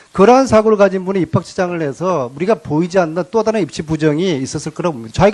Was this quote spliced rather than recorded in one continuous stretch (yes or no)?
yes